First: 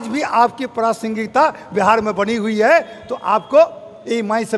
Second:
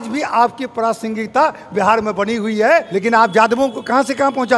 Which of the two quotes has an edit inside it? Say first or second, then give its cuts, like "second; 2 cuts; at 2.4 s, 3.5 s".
second; 1 cut; at 2.9 s